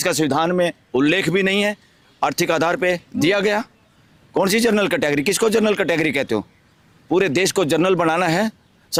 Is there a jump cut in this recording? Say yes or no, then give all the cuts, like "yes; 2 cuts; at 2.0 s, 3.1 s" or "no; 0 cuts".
no; 0 cuts